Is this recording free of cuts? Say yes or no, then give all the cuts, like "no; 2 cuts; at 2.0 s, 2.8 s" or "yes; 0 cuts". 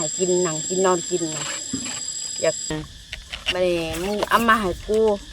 no; 1 cut; at 2.7 s